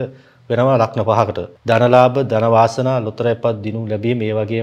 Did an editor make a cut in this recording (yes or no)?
yes